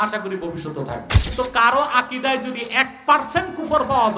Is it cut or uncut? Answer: cut